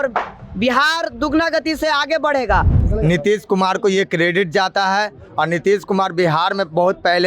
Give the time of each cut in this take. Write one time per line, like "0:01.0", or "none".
0:02.8